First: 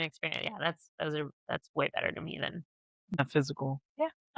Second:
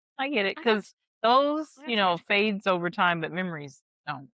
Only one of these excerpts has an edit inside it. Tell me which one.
first; 1 cut; at 3.2 s

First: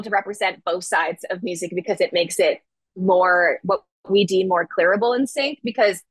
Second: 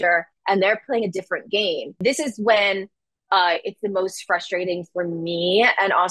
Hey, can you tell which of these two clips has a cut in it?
second; 1 cut; at 2.0 s

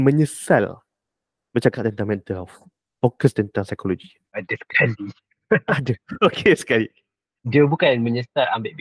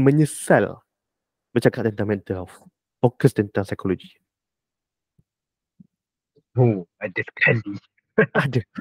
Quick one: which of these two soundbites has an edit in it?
first; 1 cut; at 4.2 s

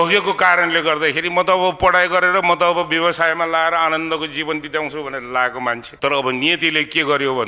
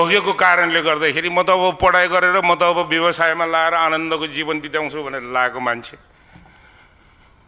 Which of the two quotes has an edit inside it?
first; 1 cut; at 5.9 s

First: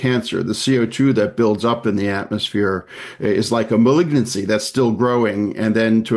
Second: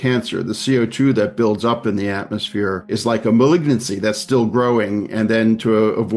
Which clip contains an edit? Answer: second; 1 cut; at 2.9 s

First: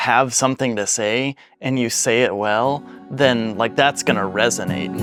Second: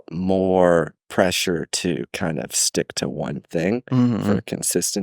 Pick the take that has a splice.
second; 1 cut; at 1.0 s

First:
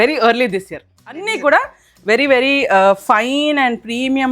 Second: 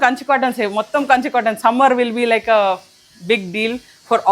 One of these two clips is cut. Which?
first; 1 cut; at 1.3 s

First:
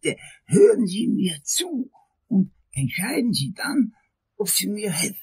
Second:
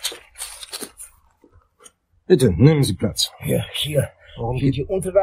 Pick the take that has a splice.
first; 1 cut; at 2.2 s

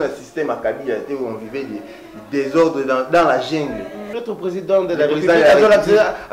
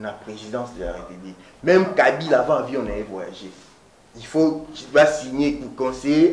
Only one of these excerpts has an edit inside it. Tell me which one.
first; 1 cut; at 4.1 s

